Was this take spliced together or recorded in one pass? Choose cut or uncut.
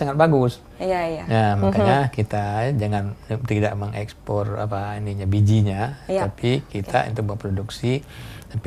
uncut